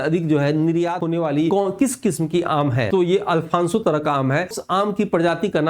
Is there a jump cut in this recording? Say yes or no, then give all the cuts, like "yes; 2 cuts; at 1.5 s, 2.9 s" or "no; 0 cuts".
yes; 3 cuts; at 1.1 s, 2.9 s, 4.6 s